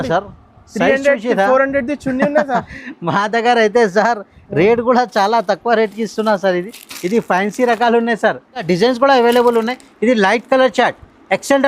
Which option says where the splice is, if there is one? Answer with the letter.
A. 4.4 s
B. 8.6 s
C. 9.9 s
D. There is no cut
B